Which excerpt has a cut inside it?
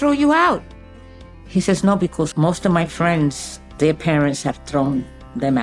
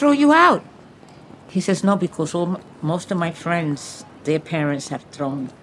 first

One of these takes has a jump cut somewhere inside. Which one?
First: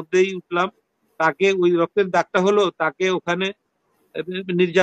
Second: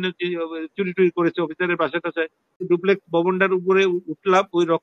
second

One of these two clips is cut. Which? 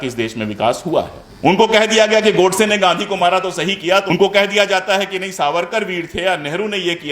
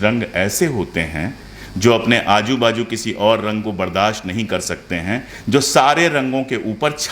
first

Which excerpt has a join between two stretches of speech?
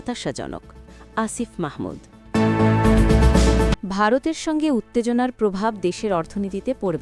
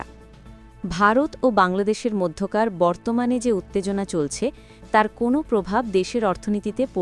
first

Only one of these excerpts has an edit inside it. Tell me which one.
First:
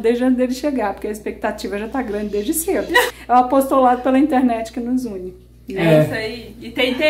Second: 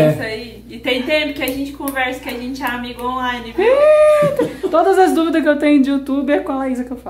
first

